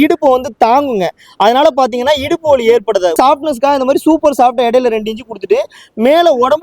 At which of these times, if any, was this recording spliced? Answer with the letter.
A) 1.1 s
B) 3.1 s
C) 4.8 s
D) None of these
B